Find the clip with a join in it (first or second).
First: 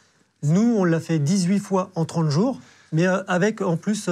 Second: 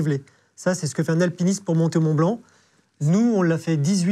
first